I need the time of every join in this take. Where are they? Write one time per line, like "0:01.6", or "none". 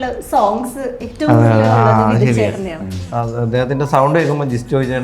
0:03.0